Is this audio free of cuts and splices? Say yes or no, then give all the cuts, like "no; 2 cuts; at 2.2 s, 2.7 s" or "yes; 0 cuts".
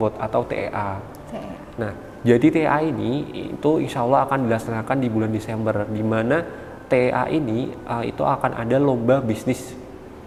yes; 0 cuts